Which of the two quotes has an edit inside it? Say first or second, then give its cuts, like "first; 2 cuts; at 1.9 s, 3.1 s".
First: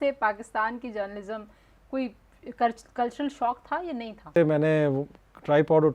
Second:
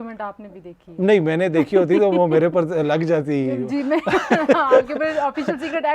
first; 1 cut; at 4.3 s